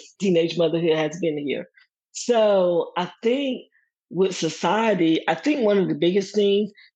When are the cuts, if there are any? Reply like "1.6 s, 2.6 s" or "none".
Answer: none